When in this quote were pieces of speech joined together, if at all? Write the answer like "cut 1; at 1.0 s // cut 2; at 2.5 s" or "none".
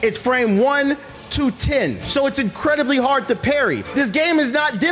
cut 1; at 2.0 s // cut 2; at 3.8 s

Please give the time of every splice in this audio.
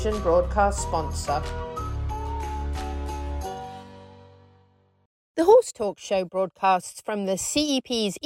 cut 1; at 5.2 s

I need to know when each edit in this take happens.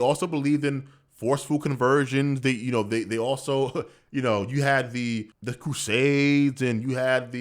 cut 1; at 5.4 s

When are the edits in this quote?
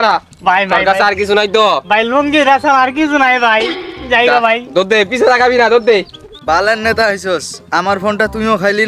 cut 1; at 6.2 s

